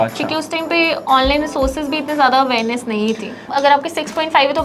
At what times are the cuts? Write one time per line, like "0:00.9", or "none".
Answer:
0:03.5